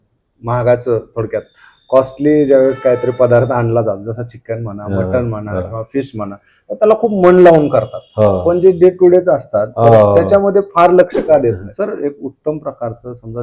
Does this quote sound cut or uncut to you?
cut